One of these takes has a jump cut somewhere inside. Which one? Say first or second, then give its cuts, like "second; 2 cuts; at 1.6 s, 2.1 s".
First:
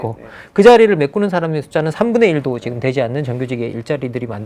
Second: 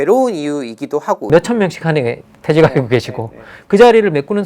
second; 1 cut; at 1.3 s